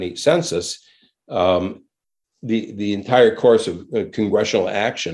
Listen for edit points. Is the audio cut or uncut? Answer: uncut